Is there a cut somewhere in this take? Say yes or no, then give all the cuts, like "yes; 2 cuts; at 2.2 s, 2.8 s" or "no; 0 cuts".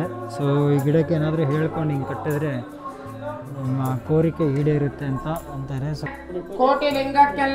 yes; 1 cut; at 6.0 s